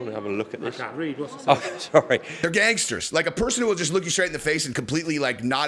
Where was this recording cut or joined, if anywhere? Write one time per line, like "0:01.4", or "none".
0:02.3